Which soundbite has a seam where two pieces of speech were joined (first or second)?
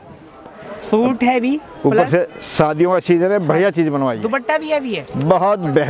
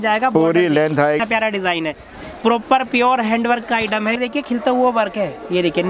second